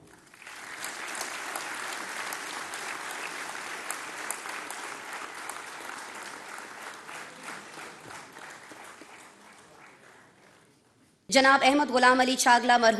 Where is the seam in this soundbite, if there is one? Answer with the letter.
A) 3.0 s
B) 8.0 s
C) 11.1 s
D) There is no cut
C